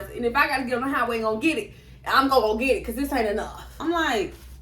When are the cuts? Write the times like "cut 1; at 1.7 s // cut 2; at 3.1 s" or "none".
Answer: cut 1; at 3.6 s